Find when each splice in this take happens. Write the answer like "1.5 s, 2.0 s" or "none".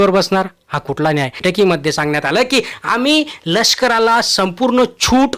1.4 s